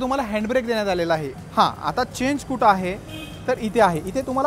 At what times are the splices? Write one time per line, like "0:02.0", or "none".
0:01.4